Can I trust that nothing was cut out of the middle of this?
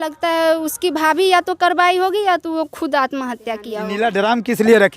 no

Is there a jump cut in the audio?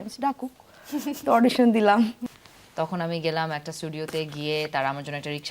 yes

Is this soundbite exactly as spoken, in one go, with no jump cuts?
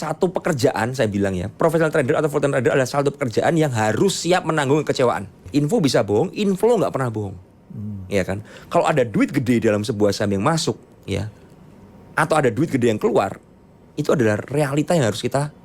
no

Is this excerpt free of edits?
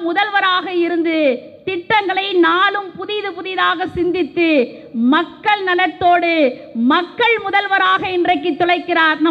yes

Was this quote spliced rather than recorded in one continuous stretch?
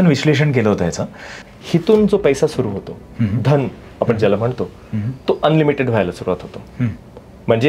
yes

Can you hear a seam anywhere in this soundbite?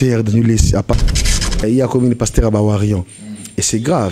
yes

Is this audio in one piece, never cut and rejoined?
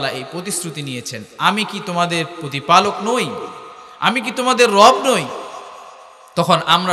yes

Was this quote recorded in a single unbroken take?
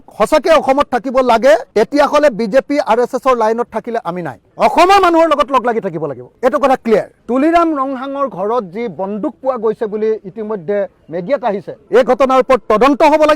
no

